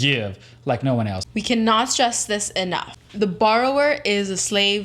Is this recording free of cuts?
no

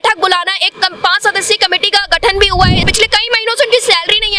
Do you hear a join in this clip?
yes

